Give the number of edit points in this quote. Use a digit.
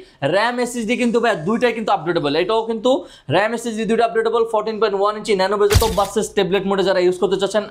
1